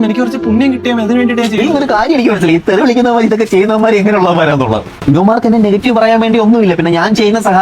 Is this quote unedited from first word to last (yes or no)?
no